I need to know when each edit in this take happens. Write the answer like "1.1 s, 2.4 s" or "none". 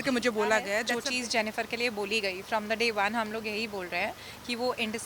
0.9 s